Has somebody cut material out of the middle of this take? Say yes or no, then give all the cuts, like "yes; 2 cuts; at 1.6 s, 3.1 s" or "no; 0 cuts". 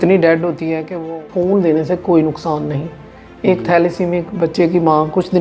yes; 1 cut; at 1.1 s